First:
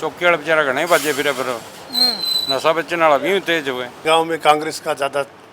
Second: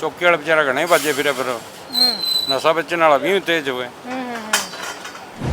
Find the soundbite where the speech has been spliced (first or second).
first